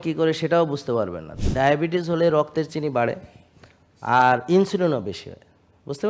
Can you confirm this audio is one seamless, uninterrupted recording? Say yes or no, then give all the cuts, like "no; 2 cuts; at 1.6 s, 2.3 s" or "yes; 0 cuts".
no; 1 cut; at 1.3 s